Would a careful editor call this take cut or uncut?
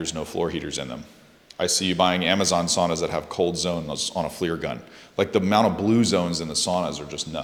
uncut